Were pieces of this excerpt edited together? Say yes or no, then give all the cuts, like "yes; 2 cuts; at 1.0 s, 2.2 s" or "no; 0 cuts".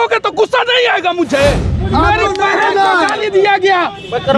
yes; 1 cut; at 1.8 s